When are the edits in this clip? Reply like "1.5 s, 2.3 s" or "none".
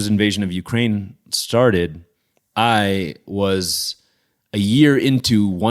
none